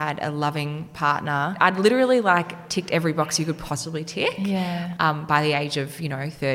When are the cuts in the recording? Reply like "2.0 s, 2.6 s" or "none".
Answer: 1.6 s

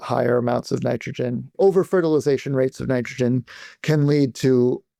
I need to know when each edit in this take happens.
none

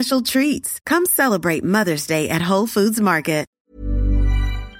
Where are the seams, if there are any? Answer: 3.5 s

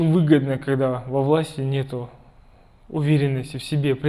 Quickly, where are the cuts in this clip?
none

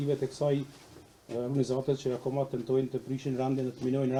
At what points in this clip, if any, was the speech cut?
none

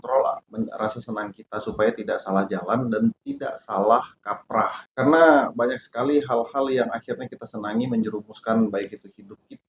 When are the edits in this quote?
none

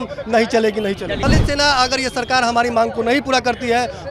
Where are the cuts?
1.2 s

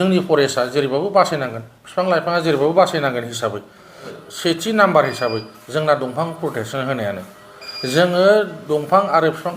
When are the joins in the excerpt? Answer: 4.2 s

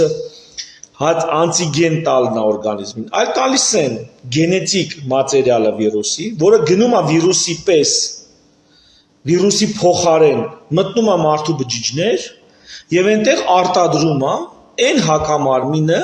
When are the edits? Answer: none

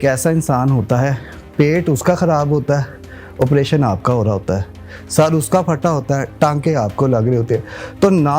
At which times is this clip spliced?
none

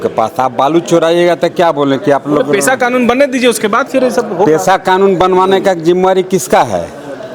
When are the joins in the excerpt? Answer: none

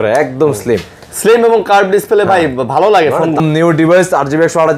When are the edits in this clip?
3.4 s

